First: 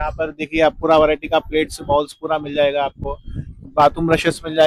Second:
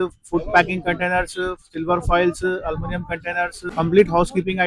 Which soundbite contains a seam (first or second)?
second